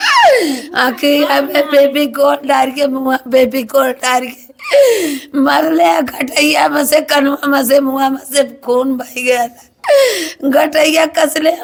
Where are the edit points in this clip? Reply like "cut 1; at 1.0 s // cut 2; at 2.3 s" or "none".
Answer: none